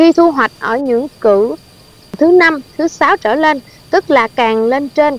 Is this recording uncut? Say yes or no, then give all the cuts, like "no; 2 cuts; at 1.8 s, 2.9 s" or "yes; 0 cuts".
yes; 0 cuts